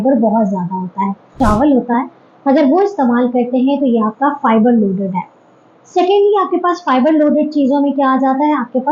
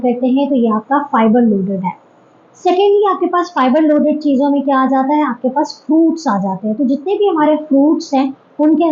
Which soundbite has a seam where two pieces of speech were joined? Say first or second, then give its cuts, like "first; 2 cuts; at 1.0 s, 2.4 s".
first; 1 cut; at 1.4 s